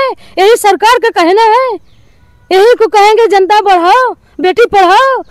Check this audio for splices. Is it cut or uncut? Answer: uncut